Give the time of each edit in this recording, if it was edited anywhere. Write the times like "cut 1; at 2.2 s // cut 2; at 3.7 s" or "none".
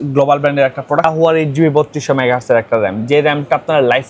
cut 1; at 1.0 s